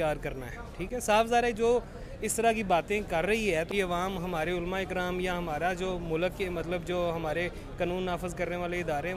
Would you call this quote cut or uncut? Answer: cut